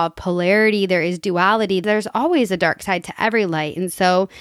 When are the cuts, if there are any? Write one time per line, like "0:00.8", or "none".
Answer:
0:01.8